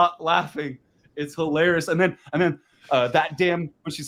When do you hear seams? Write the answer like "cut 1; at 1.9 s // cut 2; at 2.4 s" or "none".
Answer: none